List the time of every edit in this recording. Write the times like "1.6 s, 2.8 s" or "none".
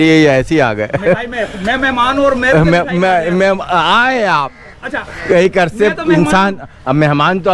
none